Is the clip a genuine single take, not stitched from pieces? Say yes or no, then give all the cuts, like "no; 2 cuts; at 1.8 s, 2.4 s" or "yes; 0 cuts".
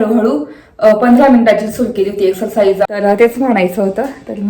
no; 1 cut; at 2.9 s